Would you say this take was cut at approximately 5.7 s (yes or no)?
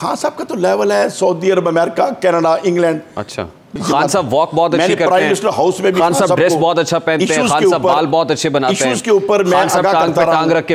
no